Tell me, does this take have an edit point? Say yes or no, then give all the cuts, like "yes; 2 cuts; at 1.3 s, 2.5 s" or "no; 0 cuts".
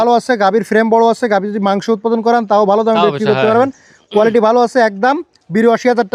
no; 0 cuts